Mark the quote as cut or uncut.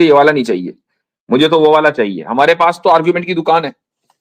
uncut